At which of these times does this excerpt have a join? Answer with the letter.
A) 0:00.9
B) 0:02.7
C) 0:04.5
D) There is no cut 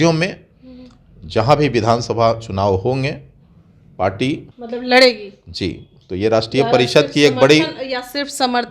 C